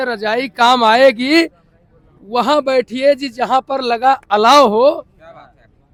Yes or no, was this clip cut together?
no